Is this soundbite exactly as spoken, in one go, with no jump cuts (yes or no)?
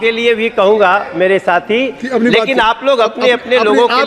yes